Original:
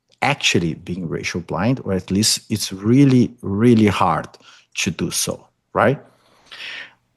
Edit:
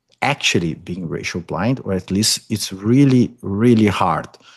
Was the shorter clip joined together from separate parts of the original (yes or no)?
no